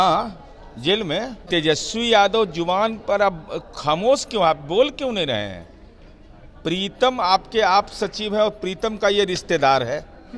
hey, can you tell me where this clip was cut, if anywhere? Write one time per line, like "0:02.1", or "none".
0:01.4